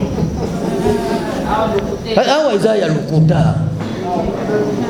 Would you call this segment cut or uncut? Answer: uncut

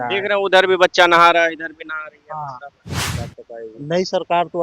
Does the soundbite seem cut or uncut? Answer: cut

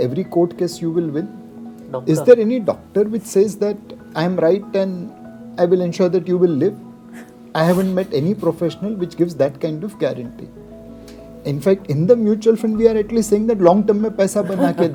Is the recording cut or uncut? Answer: uncut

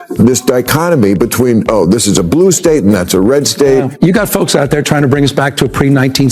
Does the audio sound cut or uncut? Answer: cut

